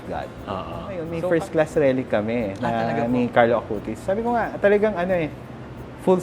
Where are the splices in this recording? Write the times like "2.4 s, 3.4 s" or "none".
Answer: 1.1 s